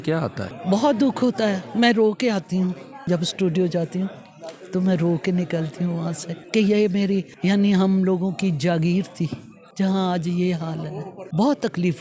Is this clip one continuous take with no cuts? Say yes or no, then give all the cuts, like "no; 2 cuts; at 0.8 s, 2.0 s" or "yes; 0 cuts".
yes; 0 cuts